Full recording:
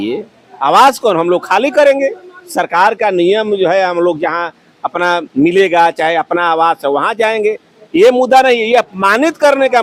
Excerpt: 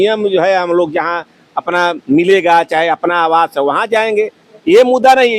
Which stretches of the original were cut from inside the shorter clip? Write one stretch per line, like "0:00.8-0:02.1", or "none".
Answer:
none